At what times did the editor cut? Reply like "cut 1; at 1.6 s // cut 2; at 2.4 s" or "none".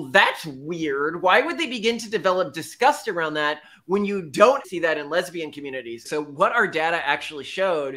cut 1; at 4.7 s // cut 2; at 6.0 s